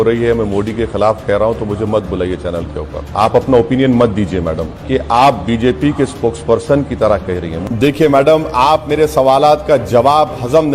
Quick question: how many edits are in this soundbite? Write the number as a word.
three